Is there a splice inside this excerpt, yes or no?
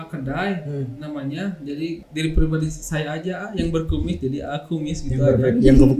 yes